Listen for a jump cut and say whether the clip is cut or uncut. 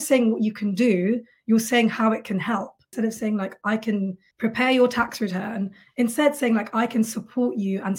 cut